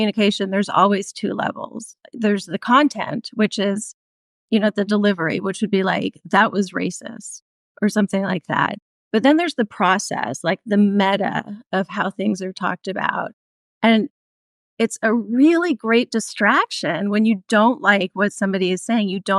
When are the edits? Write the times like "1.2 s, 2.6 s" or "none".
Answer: 1.9 s